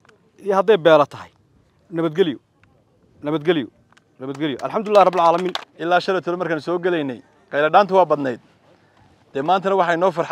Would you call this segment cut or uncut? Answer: cut